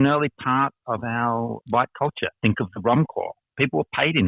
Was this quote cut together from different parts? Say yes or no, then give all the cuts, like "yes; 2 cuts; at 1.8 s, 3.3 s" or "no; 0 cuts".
yes; 1 cut; at 1.6 s